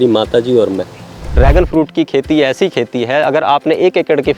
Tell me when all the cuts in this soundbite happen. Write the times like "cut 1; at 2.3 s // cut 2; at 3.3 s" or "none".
cut 1; at 1.3 s